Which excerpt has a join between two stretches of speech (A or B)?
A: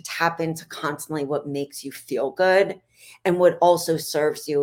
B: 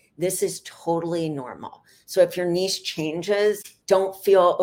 B